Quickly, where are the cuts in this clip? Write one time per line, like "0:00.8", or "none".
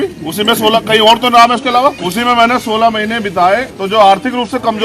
0:02.0
0:03.7